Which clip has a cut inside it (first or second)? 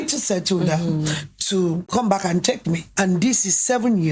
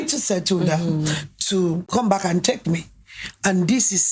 first